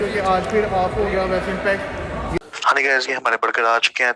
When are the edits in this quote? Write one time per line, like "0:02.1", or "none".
0:02.4